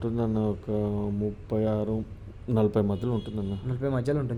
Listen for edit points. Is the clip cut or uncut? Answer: uncut